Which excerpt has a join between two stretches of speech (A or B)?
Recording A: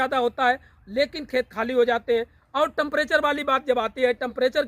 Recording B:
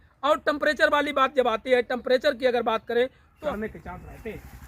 B